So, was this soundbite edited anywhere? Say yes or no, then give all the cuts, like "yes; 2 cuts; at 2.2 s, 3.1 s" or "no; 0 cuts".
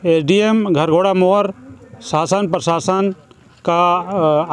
no; 0 cuts